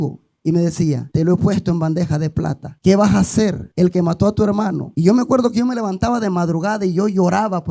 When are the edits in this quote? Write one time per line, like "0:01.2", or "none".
0:01.0
0:02.6
0:03.6
0:04.9